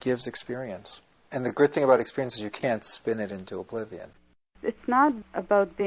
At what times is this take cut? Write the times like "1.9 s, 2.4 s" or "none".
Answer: 4.6 s